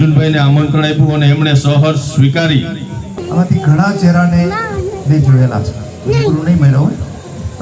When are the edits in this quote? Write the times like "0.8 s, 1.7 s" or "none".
3.1 s

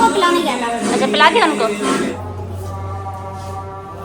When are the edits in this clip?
2.2 s

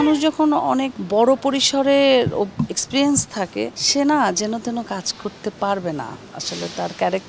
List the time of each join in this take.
1.0 s, 3.8 s

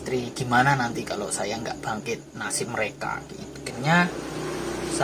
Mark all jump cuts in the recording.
3.7 s

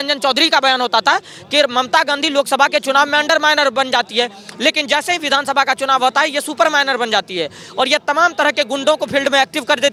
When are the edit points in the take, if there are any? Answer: none

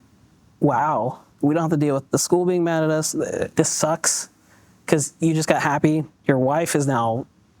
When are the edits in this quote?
1.2 s, 3.5 s, 6.1 s

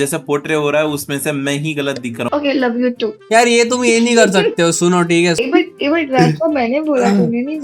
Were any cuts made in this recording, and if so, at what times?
2.3 s

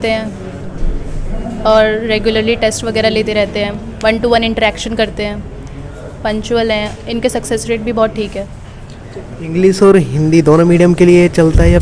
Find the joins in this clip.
none

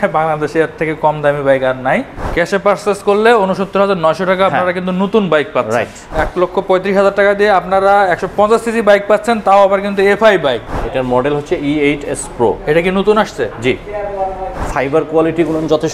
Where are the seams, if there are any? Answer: 2.2 s, 6.2 s, 10.7 s, 14.6 s

